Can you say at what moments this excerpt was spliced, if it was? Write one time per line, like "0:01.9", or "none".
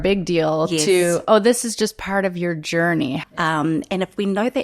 0:03.2